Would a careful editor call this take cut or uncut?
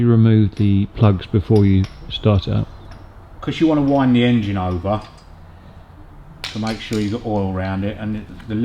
uncut